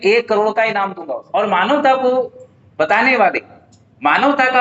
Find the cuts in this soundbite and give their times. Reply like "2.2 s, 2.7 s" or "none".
1.0 s